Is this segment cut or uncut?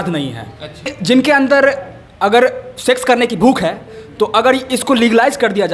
cut